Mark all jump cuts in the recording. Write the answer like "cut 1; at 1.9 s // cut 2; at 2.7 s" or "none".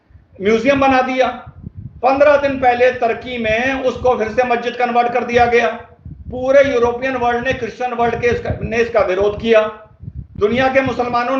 none

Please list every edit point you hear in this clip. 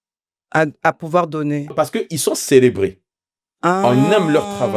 cut 1; at 1.7 s

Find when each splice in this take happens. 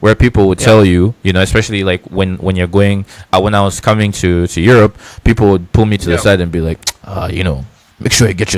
none

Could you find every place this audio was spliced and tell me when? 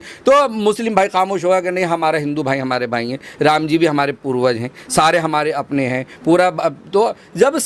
none

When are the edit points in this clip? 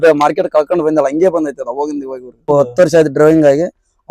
cut 1; at 2.5 s

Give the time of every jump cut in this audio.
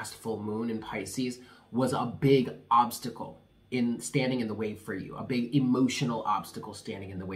none

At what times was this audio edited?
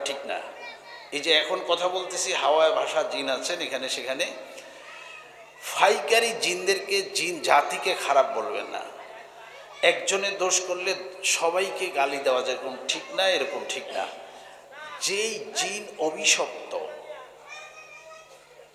none

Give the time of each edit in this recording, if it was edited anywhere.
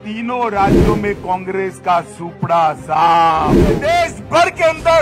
cut 1; at 3.8 s

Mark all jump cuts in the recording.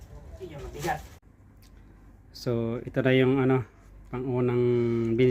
cut 1; at 1.2 s

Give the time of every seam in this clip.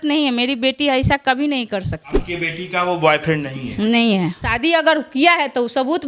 cut 1; at 2.2 s // cut 2; at 4.6 s

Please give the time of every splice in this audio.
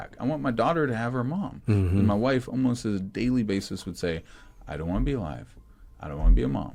none

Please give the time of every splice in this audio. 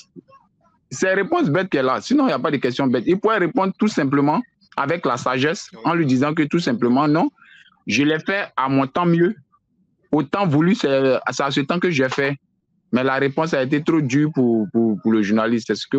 none

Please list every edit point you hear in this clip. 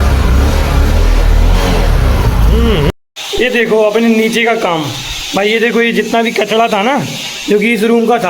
cut 1; at 2.9 s

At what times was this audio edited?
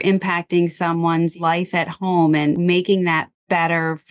cut 1; at 1.3 s // cut 2; at 2.6 s

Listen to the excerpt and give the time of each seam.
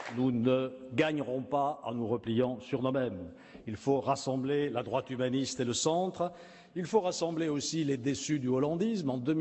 none

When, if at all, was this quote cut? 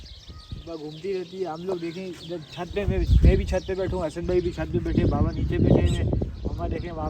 none

